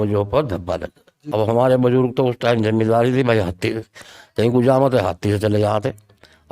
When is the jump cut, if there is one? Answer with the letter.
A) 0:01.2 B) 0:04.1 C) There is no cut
A